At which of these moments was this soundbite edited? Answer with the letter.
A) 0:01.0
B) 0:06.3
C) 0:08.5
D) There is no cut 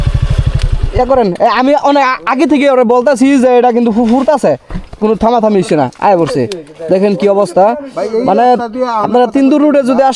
D